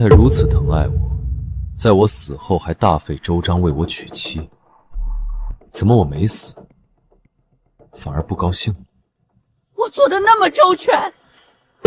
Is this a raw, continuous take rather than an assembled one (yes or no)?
yes